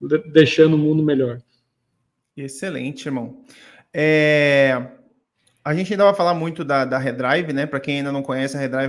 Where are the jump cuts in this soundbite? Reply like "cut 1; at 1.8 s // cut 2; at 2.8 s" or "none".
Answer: none